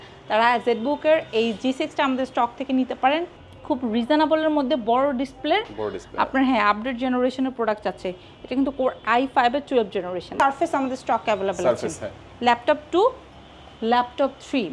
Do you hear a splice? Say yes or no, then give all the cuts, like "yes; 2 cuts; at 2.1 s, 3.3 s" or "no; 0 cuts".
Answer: yes; 2 cuts; at 3.3 s, 10.4 s